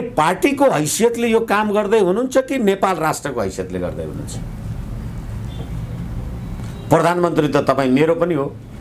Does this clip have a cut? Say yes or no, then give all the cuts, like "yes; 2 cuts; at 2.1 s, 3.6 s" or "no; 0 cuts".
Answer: no; 0 cuts